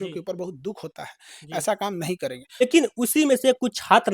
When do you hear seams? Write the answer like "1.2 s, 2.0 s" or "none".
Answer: 2.6 s